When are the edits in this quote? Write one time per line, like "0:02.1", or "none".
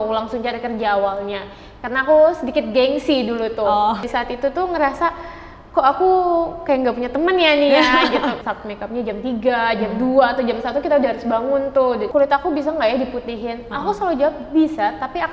0:04.0
0:08.4
0:12.0